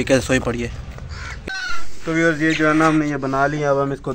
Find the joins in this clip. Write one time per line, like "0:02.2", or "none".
0:01.5